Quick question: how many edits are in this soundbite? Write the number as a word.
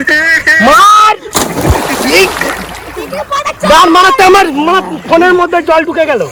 zero